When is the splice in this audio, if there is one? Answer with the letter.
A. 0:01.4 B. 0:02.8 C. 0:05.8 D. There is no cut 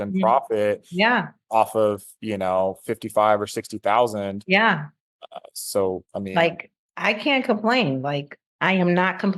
D